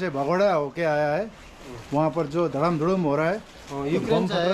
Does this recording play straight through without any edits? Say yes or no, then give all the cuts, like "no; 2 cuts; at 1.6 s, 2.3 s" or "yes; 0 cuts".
yes; 0 cuts